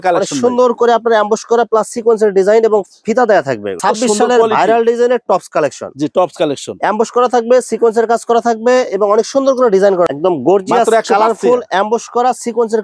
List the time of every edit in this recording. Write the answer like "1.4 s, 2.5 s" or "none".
3.8 s, 10.1 s